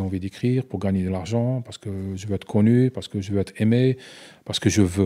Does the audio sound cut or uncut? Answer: uncut